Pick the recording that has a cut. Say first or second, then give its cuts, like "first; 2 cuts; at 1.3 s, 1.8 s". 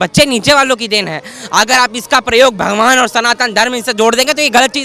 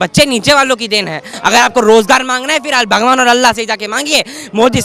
second; 1 cut; at 1.2 s